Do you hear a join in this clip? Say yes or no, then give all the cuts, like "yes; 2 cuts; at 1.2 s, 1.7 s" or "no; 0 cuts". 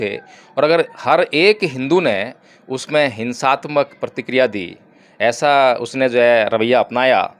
no; 0 cuts